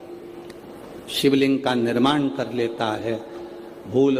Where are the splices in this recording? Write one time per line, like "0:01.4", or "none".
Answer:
none